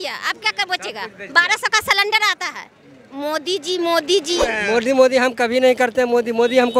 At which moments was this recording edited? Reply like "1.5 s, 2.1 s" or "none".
4.5 s